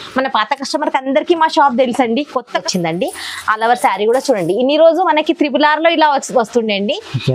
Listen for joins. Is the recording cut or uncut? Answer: cut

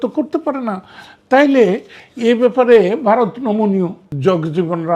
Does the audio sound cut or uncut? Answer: cut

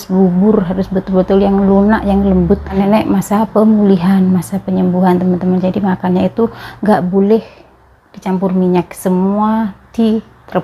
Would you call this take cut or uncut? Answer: cut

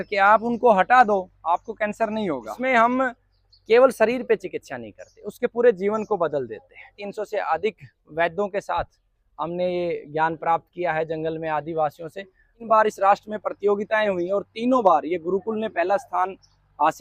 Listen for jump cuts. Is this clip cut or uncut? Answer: cut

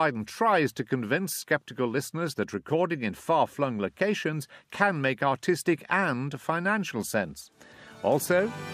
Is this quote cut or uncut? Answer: uncut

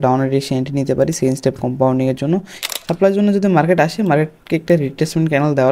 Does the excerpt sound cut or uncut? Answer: cut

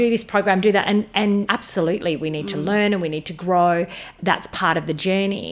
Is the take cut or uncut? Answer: cut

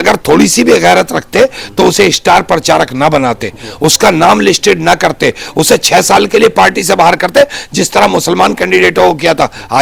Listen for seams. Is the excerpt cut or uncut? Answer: uncut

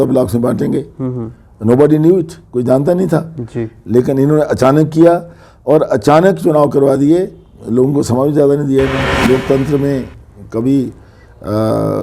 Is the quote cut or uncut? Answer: cut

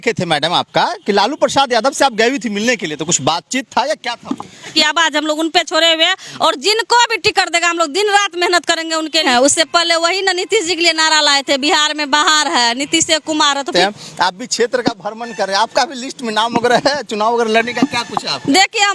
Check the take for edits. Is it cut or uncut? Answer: cut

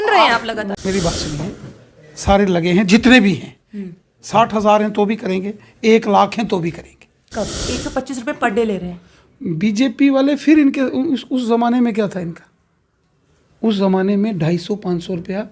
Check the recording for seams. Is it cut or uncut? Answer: cut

